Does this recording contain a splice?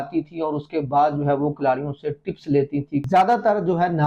yes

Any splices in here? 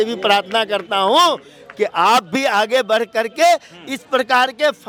no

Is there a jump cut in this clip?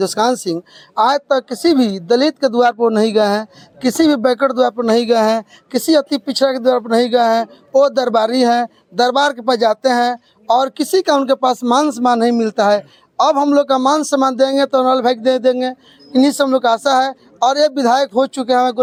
no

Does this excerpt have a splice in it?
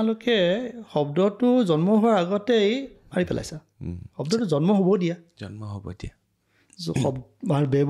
no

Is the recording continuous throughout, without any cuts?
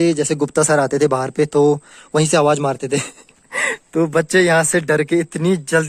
yes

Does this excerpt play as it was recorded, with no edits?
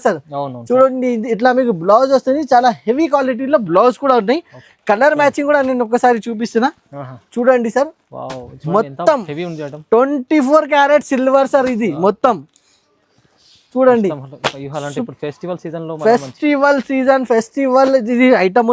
yes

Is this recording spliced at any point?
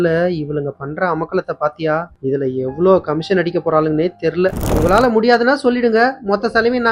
yes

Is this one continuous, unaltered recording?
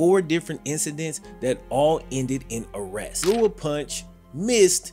no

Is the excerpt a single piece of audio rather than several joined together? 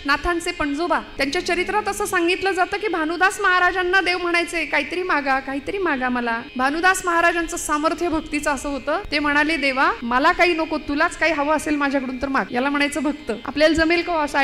no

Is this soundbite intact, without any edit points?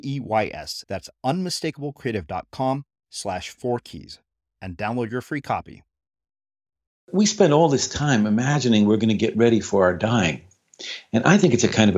no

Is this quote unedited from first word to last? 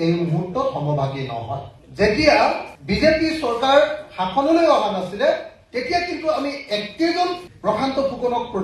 no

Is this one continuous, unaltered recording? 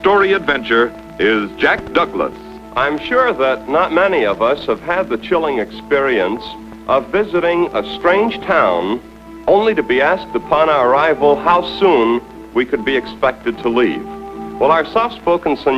yes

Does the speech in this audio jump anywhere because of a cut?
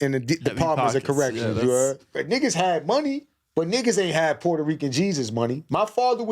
yes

